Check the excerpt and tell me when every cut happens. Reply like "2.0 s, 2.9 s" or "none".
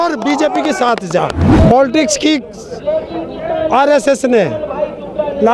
1.5 s